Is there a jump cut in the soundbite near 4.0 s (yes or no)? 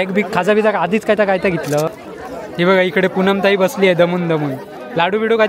no